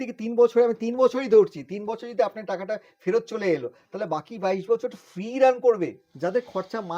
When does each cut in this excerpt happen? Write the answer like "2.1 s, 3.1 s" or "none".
6.0 s